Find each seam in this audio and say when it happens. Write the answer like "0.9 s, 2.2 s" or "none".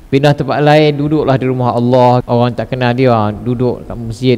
2.2 s